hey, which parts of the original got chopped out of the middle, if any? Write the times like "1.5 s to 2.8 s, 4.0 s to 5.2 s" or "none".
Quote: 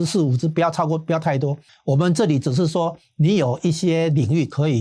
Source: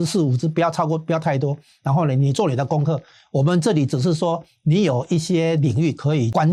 1.7 s to 3.1 s